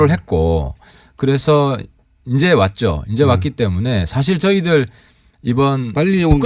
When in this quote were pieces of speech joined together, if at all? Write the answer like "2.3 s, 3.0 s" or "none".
2.6 s